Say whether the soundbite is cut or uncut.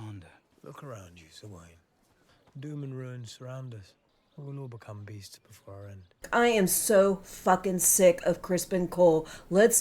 cut